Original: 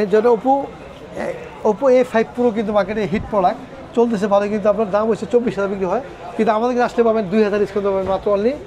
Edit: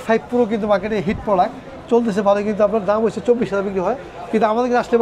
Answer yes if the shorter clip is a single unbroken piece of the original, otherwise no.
yes